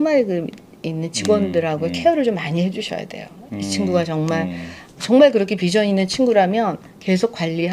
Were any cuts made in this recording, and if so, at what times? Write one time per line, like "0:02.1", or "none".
none